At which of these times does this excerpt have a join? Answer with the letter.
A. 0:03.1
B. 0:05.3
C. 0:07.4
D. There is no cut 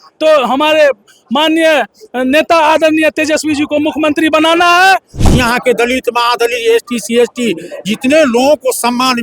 B